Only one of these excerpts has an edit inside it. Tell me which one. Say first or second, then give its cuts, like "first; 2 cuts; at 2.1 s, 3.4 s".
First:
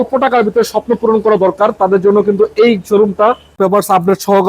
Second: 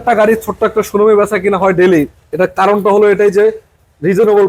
first; 1 cut; at 3.5 s